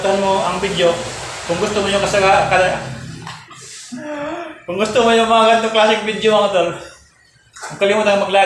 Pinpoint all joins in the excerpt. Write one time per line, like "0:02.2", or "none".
none